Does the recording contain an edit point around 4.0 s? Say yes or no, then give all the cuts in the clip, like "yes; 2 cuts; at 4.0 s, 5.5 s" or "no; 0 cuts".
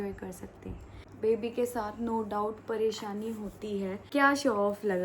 yes; 2 cuts; at 1.0 s, 4.0 s